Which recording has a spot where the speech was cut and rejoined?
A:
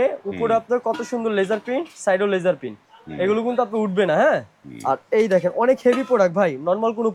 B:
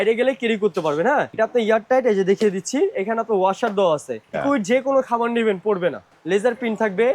B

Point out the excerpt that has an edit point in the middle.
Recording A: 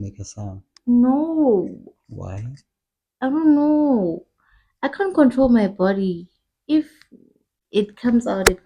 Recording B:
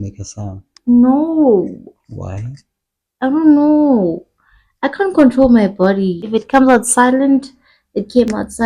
B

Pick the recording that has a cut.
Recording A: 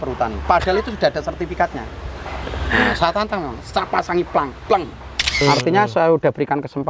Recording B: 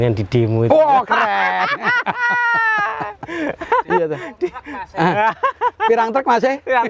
A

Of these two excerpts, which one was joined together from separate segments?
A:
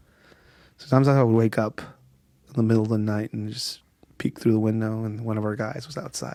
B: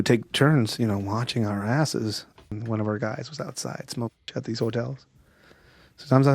B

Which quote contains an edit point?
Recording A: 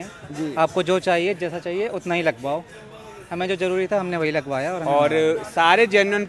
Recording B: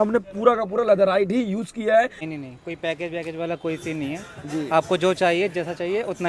B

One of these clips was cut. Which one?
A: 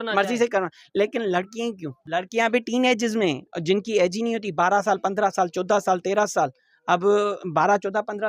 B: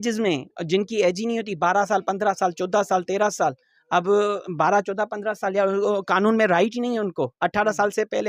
A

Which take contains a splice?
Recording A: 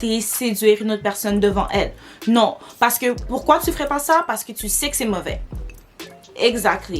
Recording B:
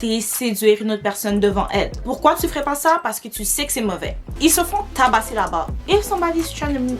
B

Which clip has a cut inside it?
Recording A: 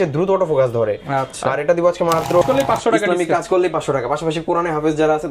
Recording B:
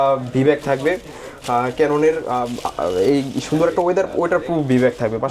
A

